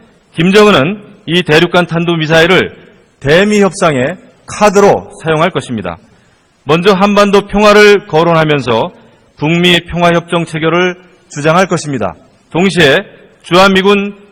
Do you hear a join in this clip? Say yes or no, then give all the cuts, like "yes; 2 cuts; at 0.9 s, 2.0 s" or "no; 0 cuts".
yes; 1 cut; at 7.0 s